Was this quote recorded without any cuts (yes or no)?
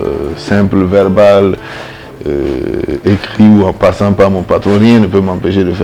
yes